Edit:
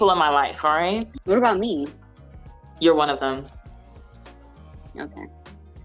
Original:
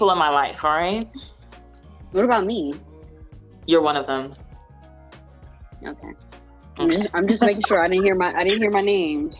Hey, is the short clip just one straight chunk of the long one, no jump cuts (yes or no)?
no